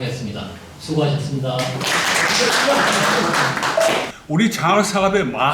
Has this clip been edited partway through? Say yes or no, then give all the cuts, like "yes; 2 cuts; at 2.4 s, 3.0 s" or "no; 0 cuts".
yes; 1 cut; at 4.1 s